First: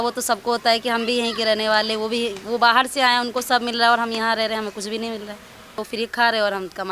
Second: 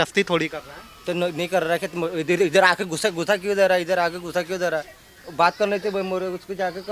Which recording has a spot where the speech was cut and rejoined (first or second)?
first